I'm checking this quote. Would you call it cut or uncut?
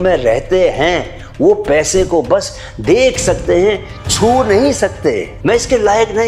cut